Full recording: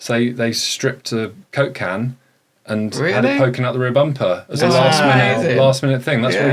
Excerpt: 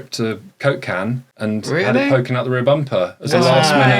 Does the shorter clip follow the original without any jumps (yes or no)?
no